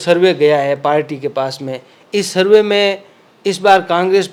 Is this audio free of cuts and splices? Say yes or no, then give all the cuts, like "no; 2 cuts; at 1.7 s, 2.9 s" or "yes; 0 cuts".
yes; 0 cuts